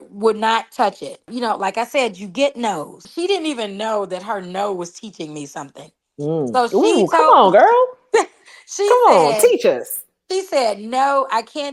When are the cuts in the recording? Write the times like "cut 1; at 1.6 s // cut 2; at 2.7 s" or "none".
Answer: cut 1; at 1.3 s // cut 2; at 3.0 s